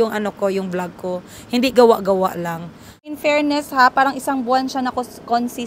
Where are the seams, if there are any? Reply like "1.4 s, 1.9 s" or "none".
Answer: 3.2 s